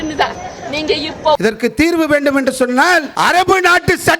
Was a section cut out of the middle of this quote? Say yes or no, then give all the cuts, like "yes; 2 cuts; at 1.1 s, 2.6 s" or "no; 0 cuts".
yes; 2 cuts; at 1.4 s, 3.1 s